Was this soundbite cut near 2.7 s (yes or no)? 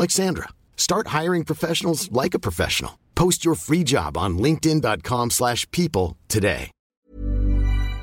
no